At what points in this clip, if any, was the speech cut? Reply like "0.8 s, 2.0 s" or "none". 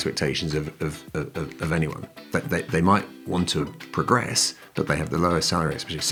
none